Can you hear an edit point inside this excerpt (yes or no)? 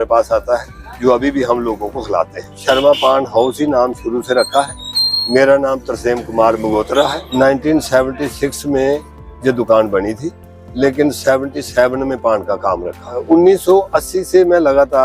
yes